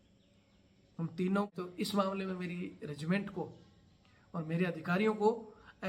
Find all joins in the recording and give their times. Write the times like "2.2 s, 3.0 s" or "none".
1.5 s